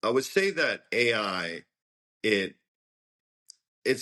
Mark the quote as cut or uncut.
uncut